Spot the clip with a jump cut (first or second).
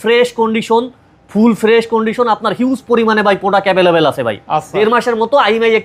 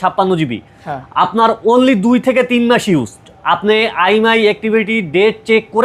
first